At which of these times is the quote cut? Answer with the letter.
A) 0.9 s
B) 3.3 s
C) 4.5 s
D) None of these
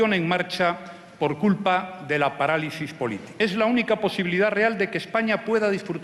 B